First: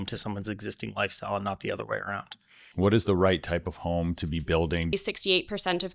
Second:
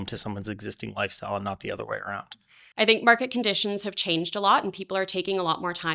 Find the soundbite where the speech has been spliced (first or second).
first